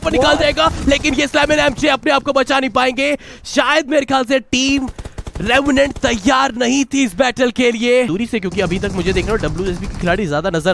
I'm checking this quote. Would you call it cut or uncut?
uncut